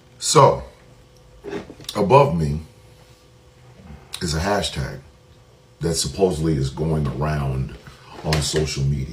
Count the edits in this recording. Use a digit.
0